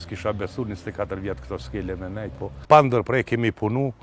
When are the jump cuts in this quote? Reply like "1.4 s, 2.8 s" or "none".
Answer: 2.6 s